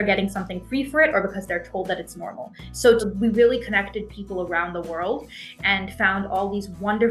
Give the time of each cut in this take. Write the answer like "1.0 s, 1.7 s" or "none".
3.0 s